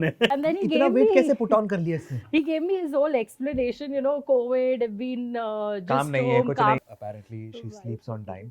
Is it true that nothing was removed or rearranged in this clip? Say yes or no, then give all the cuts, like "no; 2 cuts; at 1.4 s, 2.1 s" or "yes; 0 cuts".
no; 1 cut; at 6.8 s